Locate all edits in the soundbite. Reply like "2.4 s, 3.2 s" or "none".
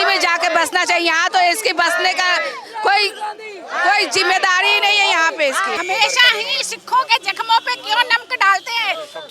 5.8 s